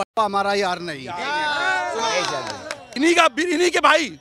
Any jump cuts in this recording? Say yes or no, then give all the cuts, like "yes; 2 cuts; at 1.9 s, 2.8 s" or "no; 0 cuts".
yes; 1 cut; at 2.8 s